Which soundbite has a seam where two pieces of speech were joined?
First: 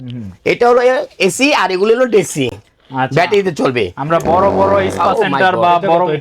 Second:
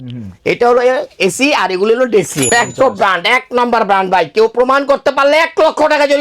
second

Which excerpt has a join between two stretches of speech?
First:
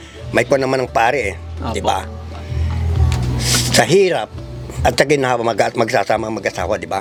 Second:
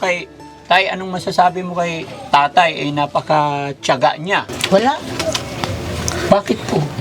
second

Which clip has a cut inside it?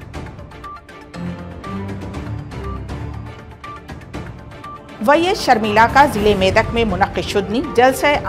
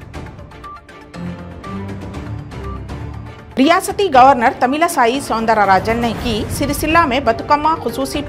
second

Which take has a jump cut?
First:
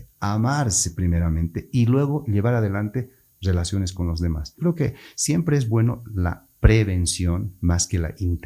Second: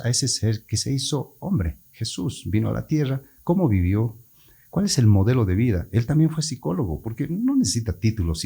first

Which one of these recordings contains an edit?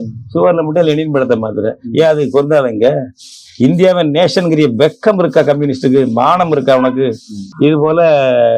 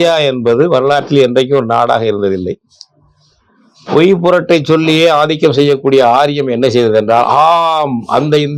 first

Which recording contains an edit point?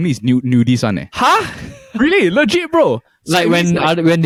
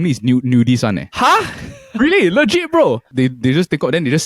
second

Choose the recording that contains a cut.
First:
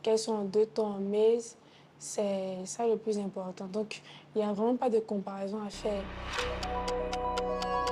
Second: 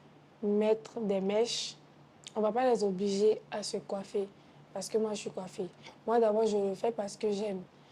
first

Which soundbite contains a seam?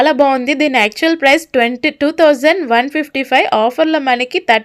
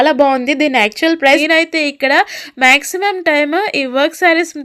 second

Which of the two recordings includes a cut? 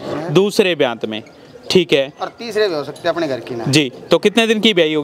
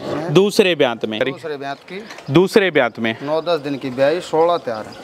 second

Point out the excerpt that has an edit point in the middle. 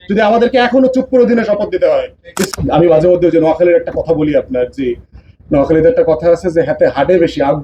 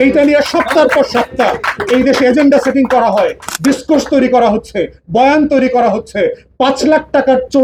first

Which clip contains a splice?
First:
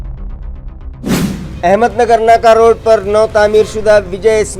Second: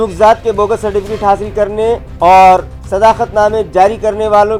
first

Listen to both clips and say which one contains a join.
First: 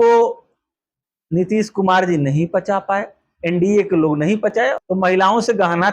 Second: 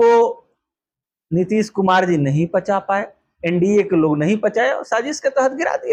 first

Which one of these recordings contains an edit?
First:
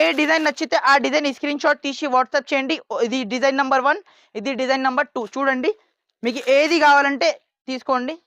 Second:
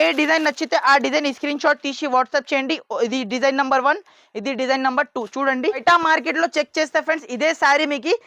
second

